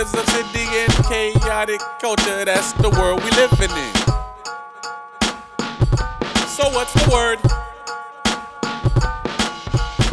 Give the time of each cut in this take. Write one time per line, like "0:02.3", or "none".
0:07.5